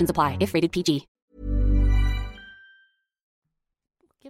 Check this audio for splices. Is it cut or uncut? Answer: uncut